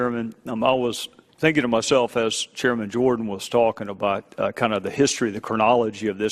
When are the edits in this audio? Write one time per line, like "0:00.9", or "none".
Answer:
0:02.7